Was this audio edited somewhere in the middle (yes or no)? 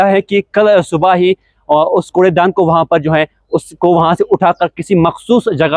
no